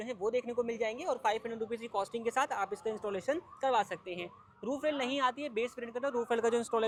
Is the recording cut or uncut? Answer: uncut